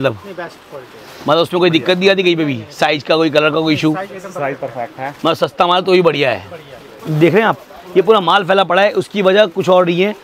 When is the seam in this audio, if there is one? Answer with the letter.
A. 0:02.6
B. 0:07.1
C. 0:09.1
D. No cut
B